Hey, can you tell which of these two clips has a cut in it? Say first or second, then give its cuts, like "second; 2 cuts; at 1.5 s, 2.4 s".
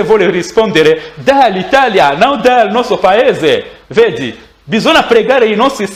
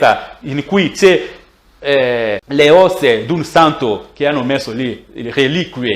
second; 1 cut; at 2.4 s